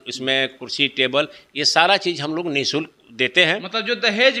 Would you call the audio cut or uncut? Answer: uncut